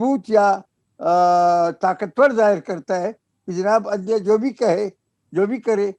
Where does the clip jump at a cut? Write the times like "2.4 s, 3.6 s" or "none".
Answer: none